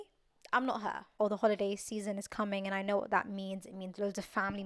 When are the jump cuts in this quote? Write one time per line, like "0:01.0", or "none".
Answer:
0:01.2